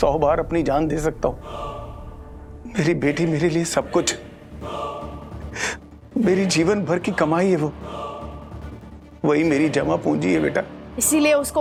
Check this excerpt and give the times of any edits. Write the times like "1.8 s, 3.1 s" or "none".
none